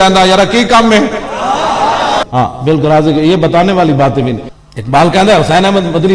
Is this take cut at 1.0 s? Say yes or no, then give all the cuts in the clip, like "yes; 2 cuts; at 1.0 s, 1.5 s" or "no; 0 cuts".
no; 2 cuts; at 2.2 s, 4.5 s